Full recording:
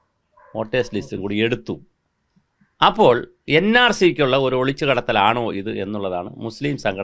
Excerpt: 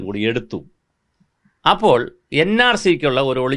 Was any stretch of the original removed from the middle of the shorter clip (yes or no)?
no